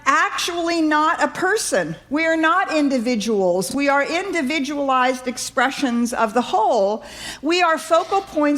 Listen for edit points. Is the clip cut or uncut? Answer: uncut